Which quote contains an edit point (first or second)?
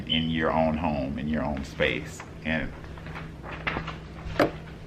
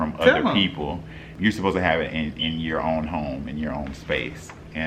second